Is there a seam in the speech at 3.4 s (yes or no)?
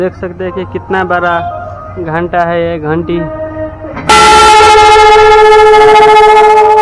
yes